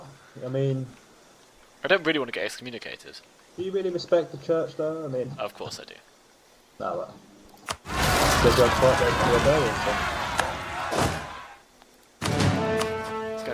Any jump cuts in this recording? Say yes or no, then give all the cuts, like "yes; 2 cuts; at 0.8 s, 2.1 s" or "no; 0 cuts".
yes; 1 cut; at 8.2 s